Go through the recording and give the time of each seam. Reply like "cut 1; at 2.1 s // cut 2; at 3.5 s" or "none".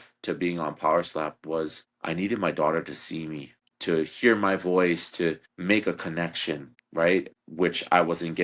cut 1; at 3.7 s